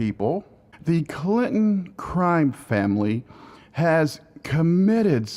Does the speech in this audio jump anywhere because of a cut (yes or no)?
yes